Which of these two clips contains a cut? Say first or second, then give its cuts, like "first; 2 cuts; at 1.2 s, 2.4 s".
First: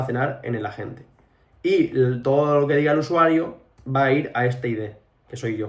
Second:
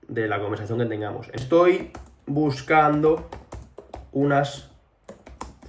second; 1 cut; at 1.4 s